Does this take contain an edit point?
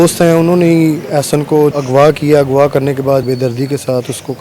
yes; 2 cuts; at 1.7 s, 3.2 s

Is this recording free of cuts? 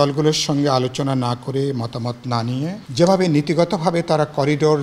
no; 1 cut; at 2.8 s

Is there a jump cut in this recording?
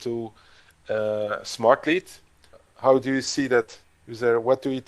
yes; 1 cut; at 2.5 s

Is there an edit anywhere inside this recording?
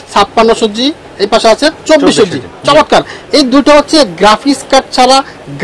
no; 0 cuts

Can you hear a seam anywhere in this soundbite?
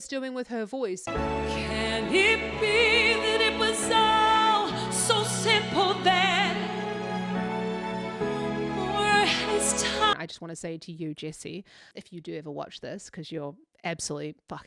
yes; 3 cuts; at 1.1 s, 10.1 s, 11.9 s

